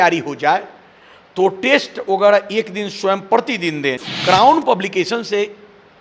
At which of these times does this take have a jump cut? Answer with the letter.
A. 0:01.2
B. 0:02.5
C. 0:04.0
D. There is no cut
C